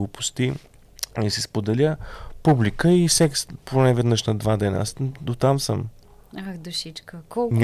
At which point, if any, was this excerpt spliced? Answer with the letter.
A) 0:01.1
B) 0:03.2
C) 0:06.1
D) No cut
D